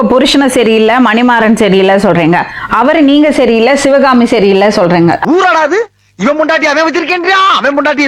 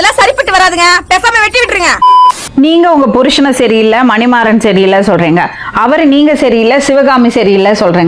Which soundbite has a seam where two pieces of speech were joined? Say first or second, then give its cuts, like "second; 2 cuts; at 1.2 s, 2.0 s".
second; 1 cut; at 2.1 s